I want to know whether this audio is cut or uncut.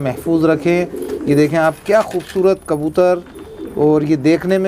uncut